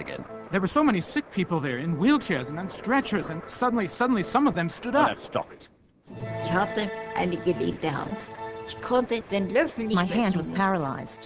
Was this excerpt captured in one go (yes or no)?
no